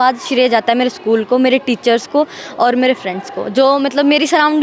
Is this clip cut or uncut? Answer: uncut